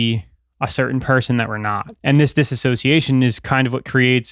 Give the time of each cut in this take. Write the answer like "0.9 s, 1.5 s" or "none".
1.9 s